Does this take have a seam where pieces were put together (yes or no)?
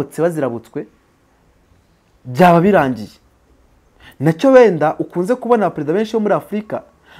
no